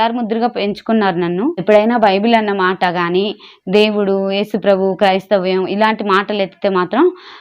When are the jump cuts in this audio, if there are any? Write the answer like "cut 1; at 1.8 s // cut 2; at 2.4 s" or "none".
cut 1; at 1.6 s

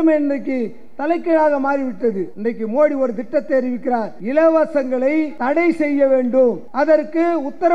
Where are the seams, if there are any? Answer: cut 1; at 2.3 s // cut 2; at 4.2 s // cut 3; at 5.3 s // cut 4; at 6.6 s

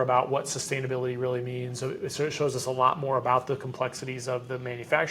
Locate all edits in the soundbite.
none

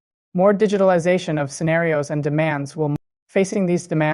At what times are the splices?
cut 1; at 2.9 s

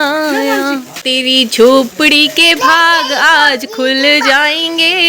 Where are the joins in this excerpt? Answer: cut 1; at 1.0 s

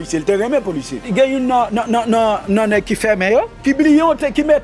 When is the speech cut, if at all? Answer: cut 1; at 1.1 s // cut 2; at 3.5 s

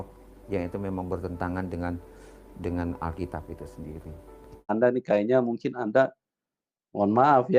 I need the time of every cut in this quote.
cut 1; at 4.7 s

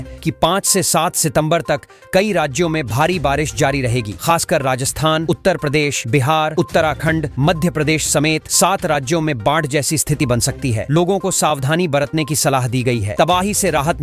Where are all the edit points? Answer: none

